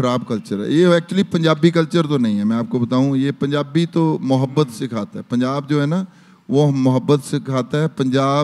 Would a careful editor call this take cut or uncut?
uncut